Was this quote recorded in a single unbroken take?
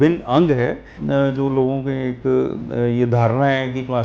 no; 1 cut; at 1.0 s

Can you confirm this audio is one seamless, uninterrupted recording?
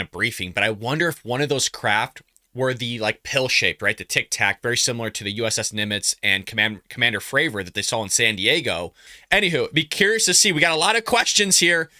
no; 1 cut; at 9.1 s

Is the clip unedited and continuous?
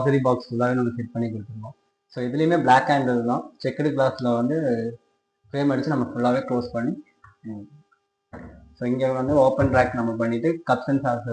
yes; 0 cuts

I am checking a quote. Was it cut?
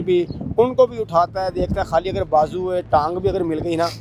no; 0 cuts

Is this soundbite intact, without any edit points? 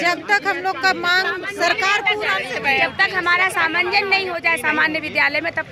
yes; 0 cuts

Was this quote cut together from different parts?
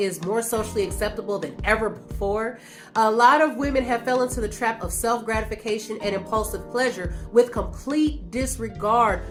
no; 0 cuts

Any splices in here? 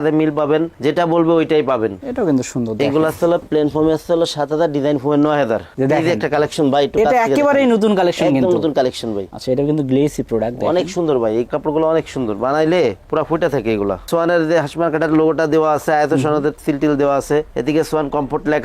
yes; 4 cuts; at 2.0 s, 5.7 s, 9.3 s, 14.1 s

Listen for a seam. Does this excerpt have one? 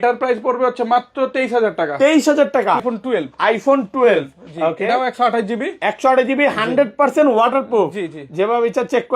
yes; 1 cut; at 2.8 s

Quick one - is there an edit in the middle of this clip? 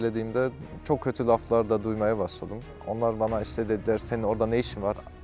no; 0 cuts

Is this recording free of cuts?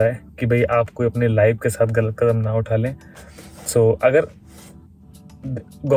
yes; 0 cuts

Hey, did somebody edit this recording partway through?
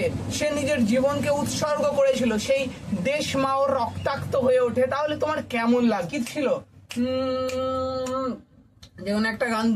yes; 1 cut; at 6.1 s

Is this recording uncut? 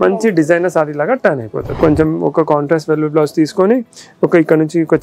no; 1 cut; at 1.6 s

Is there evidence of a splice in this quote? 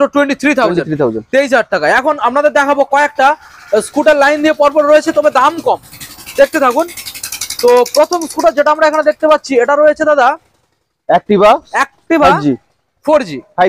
no; 0 cuts

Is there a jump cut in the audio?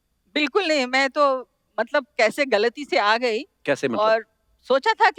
no; 0 cuts

